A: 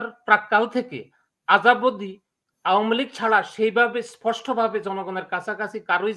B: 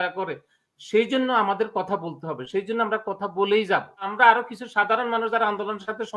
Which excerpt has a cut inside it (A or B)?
B